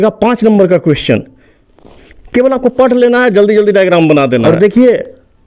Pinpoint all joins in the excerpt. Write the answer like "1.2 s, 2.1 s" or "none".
4.4 s